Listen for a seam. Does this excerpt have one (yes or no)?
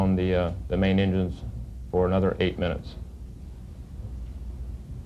yes